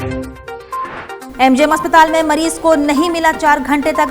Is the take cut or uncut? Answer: cut